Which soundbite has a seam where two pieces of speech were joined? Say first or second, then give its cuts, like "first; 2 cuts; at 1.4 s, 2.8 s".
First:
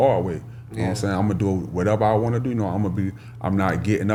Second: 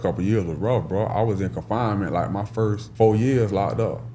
second; 1 cut; at 2.8 s